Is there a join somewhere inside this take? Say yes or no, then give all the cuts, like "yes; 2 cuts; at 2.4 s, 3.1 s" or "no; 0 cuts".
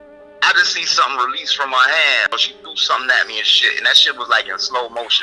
yes; 1 cut; at 2.3 s